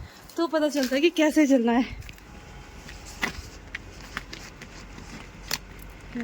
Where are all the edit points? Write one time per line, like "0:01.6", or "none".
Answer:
0:02.2